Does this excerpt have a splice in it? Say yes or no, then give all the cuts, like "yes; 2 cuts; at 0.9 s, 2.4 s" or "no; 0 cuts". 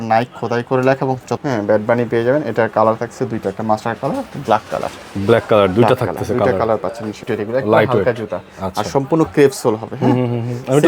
yes; 2 cuts; at 1.3 s, 7.2 s